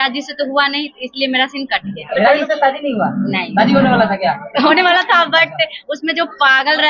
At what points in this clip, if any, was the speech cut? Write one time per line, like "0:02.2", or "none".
none